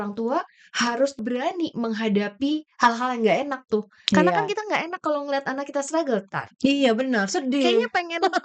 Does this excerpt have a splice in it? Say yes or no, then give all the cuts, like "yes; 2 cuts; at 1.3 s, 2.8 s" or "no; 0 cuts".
yes; 1 cut; at 1.2 s